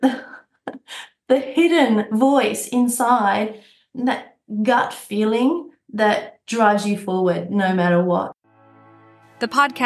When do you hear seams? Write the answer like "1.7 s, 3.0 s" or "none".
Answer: 8.3 s